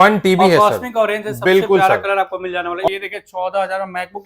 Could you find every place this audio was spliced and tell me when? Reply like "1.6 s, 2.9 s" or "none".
2.9 s